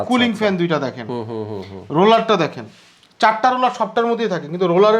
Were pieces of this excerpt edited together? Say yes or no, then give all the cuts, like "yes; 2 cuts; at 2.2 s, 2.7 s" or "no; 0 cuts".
no; 0 cuts